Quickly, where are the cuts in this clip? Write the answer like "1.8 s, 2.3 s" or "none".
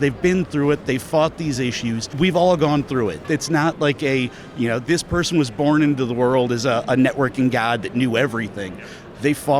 2.1 s

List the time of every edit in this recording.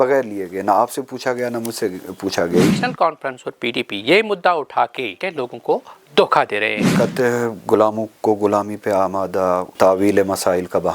2.7 s, 5.2 s, 6.9 s, 9.7 s

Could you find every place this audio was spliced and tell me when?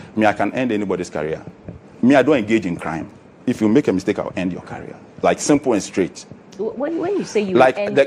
none

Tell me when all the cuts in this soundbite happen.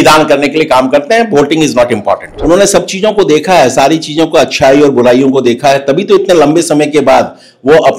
2.3 s

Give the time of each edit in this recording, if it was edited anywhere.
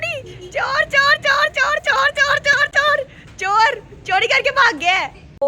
none

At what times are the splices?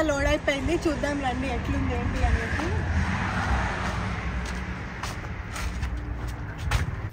none

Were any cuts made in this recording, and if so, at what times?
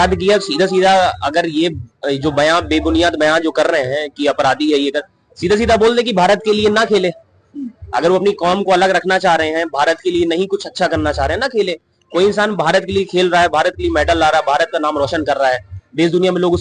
none

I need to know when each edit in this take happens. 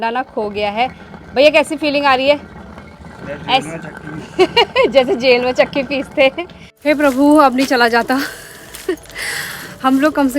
6.6 s

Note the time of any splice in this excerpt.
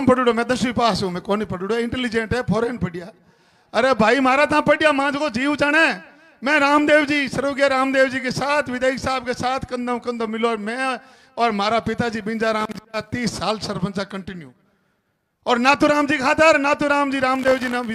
none

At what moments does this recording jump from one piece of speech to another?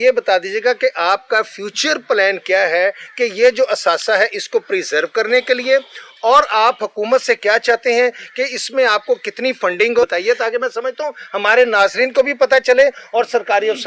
10.0 s

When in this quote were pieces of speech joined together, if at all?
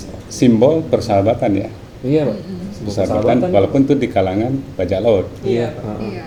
none

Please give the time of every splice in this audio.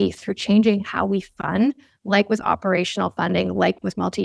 none

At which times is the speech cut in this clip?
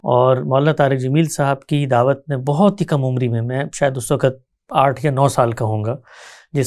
none

